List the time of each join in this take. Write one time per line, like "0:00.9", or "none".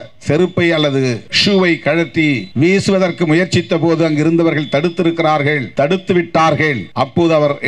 0:01.3
0:02.5
0:05.7
0:06.8